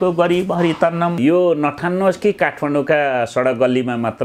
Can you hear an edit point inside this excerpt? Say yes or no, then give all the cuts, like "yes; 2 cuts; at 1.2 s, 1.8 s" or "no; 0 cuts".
yes; 1 cut; at 1.2 s